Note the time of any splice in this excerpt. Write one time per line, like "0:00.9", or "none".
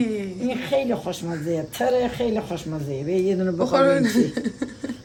none